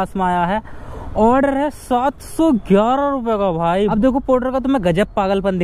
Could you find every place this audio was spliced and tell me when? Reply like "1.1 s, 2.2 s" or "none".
3.8 s